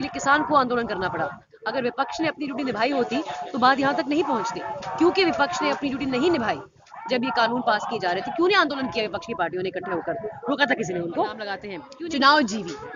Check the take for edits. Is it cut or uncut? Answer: cut